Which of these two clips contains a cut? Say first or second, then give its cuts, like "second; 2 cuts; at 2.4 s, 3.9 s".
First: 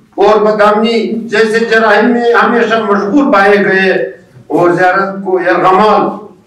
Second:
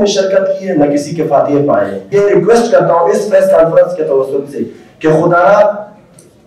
second; 1 cut; at 2.0 s